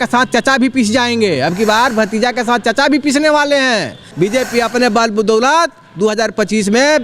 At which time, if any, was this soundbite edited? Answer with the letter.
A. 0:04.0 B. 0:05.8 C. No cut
A